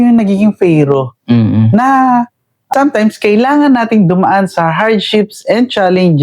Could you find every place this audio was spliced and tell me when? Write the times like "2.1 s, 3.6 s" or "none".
2.7 s